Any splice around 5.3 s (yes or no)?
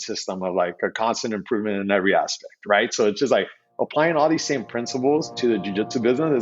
yes